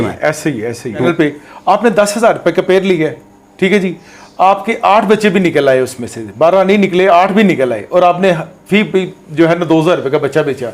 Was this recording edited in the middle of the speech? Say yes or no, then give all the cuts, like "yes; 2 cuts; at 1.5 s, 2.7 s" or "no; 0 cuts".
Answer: yes; 1 cut; at 1.0 s